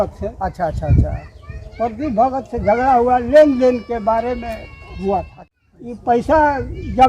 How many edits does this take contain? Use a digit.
1